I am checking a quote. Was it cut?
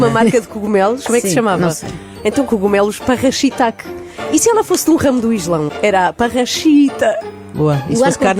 no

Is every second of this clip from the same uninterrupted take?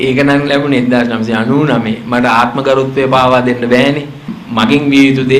no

